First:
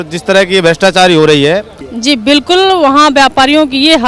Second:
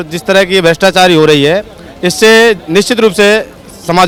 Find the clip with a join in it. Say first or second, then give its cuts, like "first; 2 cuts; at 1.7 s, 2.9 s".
first; 1 cut; at 1.9 s